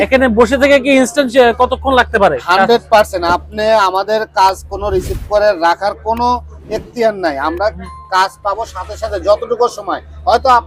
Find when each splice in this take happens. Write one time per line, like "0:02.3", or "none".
none